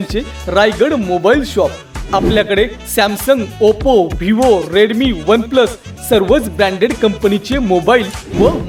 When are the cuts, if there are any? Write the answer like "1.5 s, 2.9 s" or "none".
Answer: none